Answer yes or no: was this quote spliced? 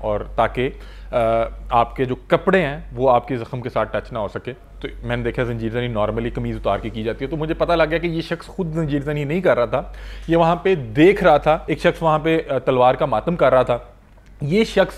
yes